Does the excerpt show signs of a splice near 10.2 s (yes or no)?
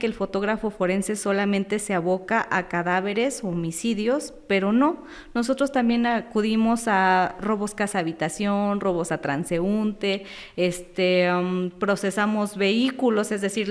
no